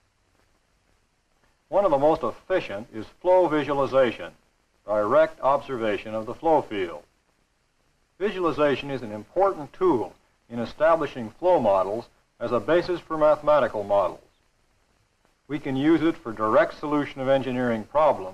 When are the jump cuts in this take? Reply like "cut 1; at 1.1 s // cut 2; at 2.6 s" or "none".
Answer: none